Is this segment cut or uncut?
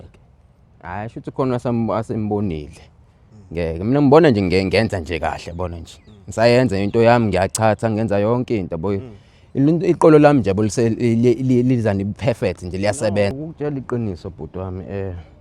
cut